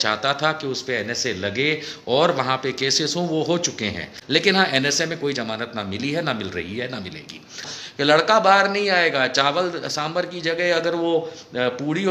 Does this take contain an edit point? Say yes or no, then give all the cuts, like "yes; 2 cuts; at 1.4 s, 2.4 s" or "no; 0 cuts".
yes; 2 cuts; at 4.1 s, 7.8 s